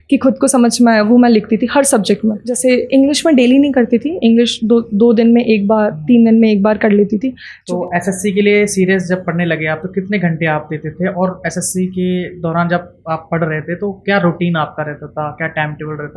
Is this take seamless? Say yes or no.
no